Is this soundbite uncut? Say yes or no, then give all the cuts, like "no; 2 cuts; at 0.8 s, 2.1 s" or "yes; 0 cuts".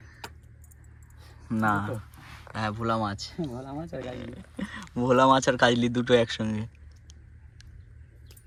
yes; 0 cuts